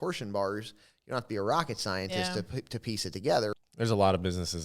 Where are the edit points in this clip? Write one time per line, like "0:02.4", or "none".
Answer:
0:03.5